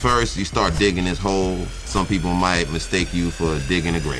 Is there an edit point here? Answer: yes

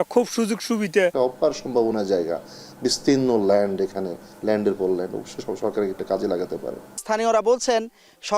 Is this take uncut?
no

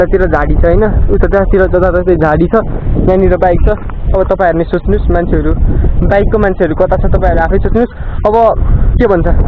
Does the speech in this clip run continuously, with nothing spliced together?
yes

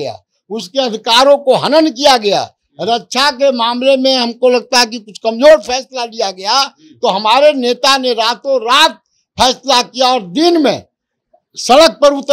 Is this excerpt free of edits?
yes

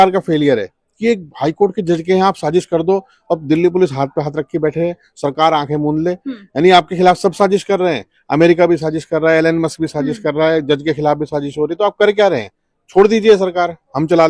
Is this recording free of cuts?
yes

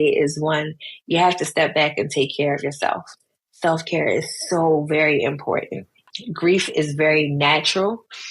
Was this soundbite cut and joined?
yes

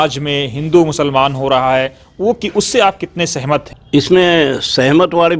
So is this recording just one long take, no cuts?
no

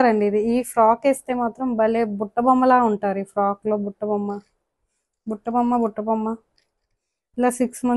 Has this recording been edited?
no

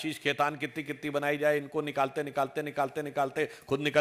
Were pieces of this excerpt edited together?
no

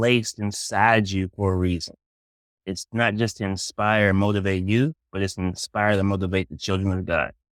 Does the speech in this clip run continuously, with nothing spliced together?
yes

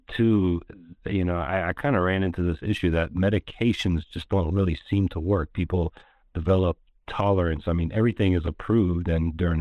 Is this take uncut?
yes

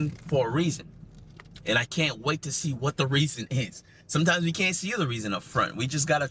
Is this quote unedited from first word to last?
yes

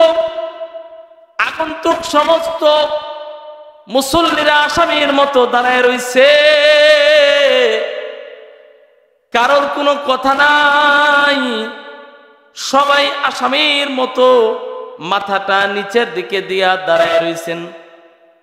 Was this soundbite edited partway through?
no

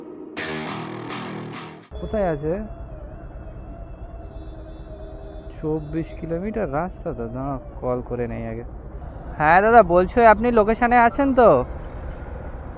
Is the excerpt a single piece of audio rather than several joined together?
yes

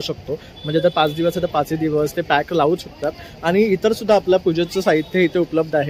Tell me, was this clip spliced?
no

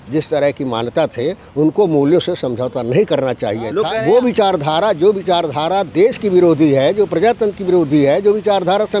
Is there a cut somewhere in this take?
yes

